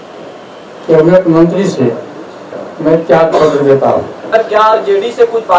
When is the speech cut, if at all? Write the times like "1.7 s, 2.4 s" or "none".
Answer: 4.2 s

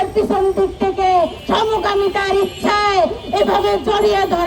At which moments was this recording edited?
1.4 s

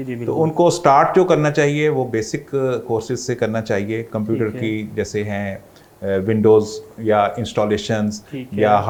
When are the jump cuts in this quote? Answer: none

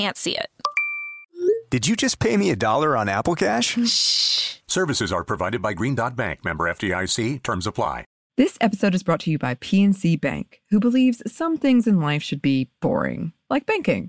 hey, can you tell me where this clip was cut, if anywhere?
8.1 s

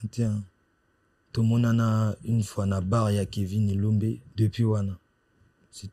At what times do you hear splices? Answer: 4.3 s

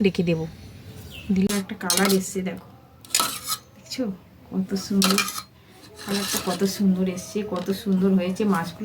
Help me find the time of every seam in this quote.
1.5 s

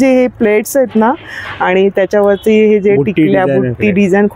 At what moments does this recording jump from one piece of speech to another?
none

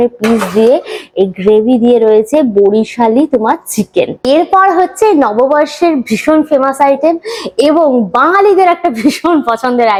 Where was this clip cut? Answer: none

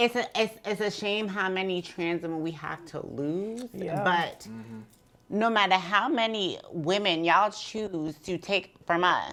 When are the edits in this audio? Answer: none

